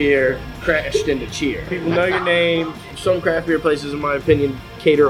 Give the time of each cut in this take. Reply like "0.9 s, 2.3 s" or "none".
1.7 s, 2.9 s